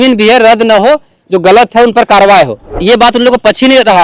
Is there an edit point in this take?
yes; 1 cut; at 2.7 s

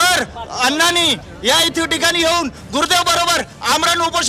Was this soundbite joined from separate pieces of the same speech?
no; 0 cuts

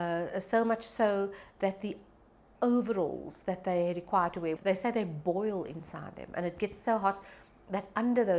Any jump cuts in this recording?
yes; 1 cut; at 4.6 s

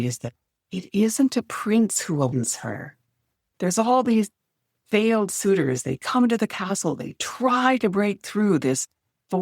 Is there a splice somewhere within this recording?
yes; 1 cut; at 3.4 s

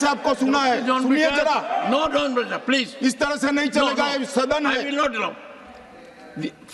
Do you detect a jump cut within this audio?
no; 0 cuts

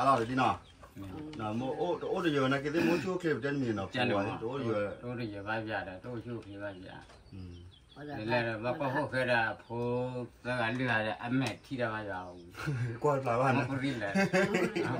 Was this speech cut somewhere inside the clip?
no; 0 cuts

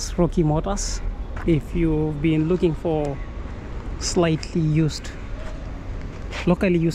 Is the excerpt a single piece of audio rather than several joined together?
yes; 0 cuts

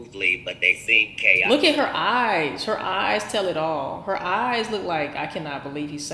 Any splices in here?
yes; 1 cut; at 1.5 s

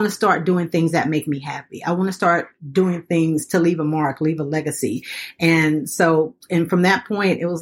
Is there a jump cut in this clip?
no; 0 cuts

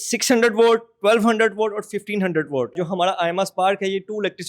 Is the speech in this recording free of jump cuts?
no; 1 cut; at 2.8 s

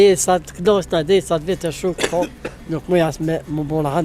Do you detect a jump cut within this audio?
no; 0 cuts

